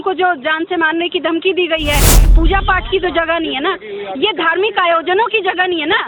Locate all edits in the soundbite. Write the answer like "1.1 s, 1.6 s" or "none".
2.3 s